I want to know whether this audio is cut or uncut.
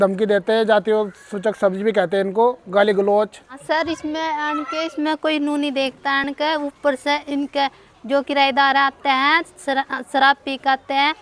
cut